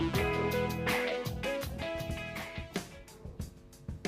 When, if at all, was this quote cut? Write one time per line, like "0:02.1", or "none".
0:01.7

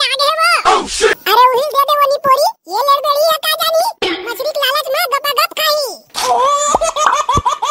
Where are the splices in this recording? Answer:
0:06.0

